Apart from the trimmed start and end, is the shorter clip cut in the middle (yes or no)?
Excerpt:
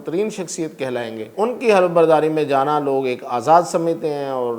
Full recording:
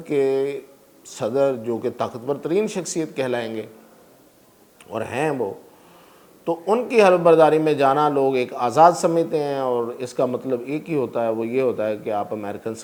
yes